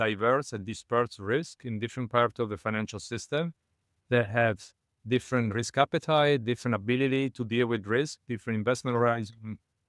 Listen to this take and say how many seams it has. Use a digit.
0